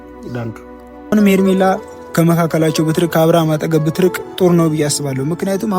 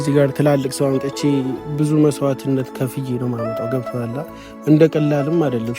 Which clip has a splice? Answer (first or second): first